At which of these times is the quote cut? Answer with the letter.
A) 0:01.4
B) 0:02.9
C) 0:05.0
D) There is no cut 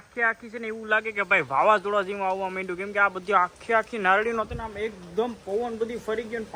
D